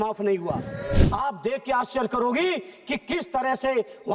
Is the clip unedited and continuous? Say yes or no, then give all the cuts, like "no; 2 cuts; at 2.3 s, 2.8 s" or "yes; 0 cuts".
no; 1 cut; at 1.0 s